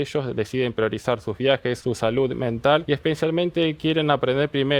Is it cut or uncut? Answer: cut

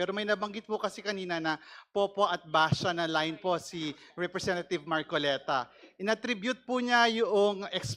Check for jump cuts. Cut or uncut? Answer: uncut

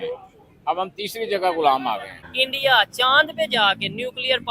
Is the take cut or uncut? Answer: cut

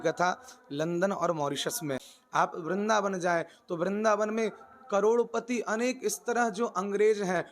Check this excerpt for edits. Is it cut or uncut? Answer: cut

